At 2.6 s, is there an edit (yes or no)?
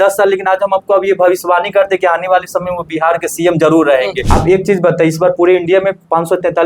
no